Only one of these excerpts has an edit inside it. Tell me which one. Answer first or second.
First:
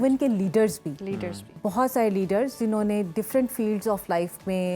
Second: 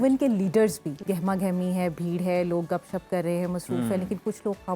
second